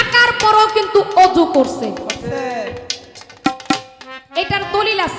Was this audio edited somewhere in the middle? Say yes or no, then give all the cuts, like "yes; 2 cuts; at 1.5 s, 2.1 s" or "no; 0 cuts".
no; 0 cuts